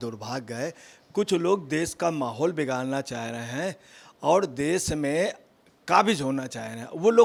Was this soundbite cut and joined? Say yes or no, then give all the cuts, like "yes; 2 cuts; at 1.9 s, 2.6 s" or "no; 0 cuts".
no; 0 cuts